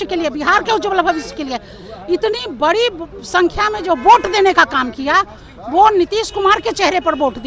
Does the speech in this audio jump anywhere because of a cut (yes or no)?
no